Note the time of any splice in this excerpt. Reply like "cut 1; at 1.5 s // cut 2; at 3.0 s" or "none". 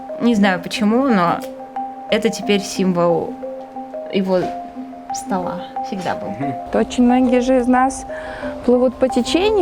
cut 1; at 6.7 s